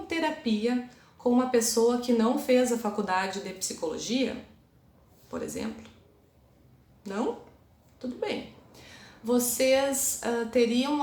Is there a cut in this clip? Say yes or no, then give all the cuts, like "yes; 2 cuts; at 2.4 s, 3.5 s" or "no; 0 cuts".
no; 0 cuts